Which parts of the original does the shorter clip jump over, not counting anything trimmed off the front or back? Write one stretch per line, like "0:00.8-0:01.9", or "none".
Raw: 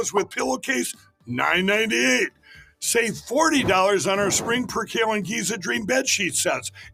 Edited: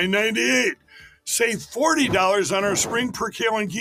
none